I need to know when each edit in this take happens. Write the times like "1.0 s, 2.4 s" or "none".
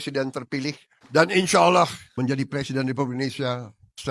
0.9 s, 2.0 s